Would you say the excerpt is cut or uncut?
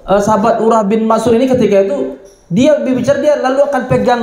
uncut